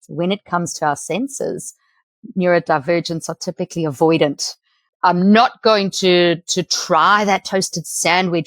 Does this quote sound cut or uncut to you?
cut